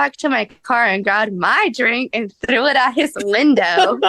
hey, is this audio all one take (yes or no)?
yes